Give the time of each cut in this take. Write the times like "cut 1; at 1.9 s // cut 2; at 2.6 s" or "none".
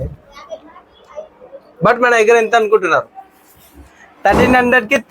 none